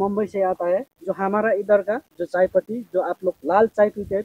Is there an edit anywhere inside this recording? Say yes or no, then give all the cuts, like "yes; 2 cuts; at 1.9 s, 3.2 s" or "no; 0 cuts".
yes; 2 cuts; at 1.0 s, 2.1 s